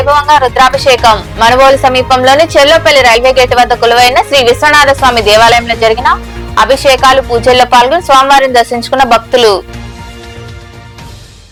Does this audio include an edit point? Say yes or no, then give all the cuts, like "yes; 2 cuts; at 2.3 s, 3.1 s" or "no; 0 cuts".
no; 0 cuts